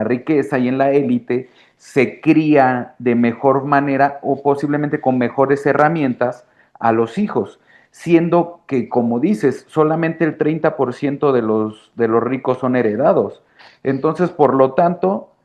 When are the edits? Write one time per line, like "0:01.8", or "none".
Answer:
none

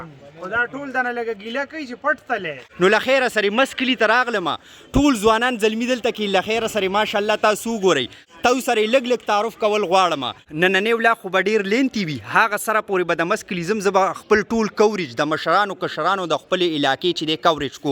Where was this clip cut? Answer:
0:02.6
0:08.3
0:10.4

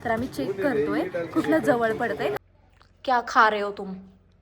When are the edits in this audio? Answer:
0:02.3

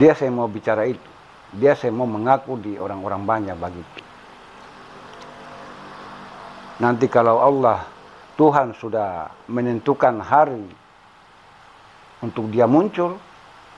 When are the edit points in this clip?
none

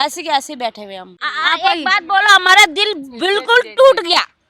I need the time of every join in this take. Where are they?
none

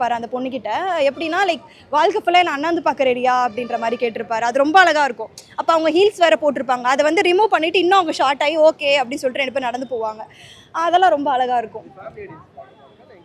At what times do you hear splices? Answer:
none

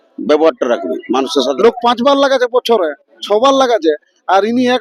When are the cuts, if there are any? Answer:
0:01.5

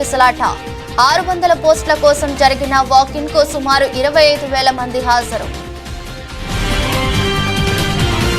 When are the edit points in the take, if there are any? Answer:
0:05.5

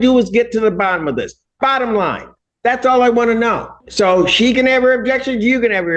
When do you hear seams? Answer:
0:03.8

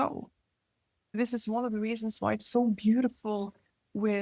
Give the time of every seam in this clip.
0:01.2

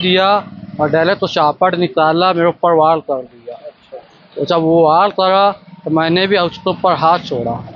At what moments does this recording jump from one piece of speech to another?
none

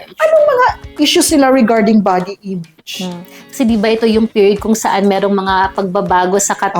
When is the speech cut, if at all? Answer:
none

